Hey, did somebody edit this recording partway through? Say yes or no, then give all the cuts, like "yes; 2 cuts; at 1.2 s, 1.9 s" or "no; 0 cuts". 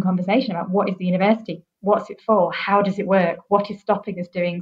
no; 0 cuts